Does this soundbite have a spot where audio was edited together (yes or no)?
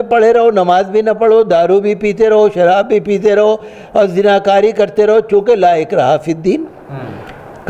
no